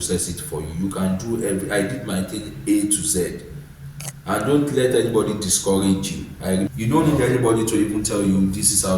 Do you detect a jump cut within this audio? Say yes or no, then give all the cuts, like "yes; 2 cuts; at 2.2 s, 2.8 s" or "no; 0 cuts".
yes; 1 cut; at 6.7 s